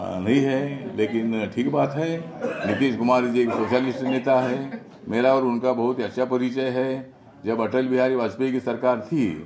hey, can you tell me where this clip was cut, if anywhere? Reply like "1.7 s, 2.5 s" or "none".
none

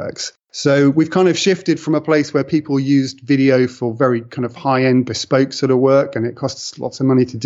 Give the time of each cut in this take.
none

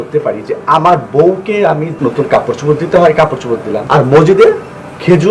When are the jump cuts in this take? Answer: 1.9 s, 3.8 s

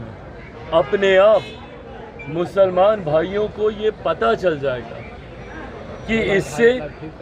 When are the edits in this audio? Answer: none

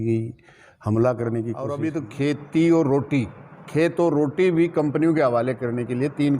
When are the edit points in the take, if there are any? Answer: 1.8 s

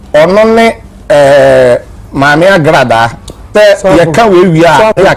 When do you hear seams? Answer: 3.5 s

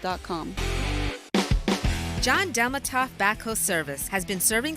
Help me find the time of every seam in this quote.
1.2 s

